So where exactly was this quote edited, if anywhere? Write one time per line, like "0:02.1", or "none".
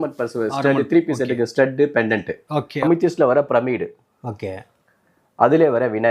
0:02.8